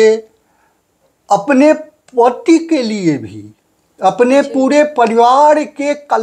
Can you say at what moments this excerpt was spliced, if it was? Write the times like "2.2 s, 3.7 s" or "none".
none